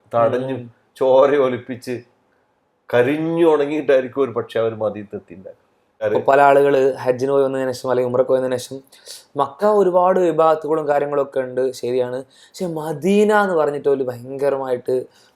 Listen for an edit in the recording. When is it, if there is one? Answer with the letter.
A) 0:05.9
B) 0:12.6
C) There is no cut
A